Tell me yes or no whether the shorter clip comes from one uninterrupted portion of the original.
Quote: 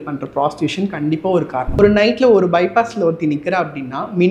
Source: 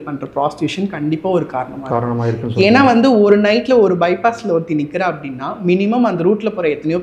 no